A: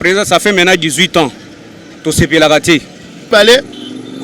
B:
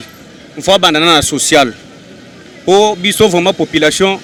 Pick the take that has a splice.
A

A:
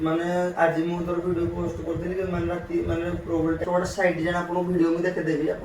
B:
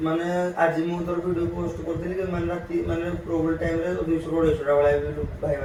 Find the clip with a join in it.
A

